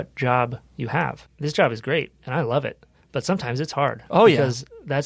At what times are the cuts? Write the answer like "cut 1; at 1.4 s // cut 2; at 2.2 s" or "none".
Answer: cut 1; at 1.3 s